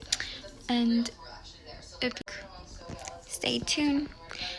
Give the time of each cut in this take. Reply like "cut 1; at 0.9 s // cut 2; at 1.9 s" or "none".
cut 1; at 2.2 s